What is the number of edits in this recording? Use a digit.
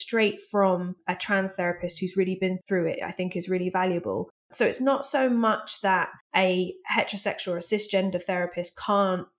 4